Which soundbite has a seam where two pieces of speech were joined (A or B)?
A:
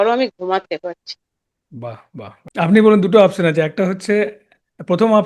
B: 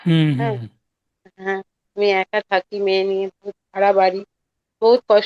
A